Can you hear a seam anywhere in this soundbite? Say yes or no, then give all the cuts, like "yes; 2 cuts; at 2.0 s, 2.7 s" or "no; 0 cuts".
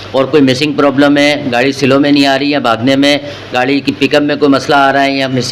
no; 0 cuts